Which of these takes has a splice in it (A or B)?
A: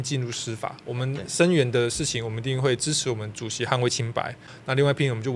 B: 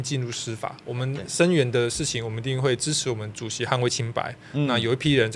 A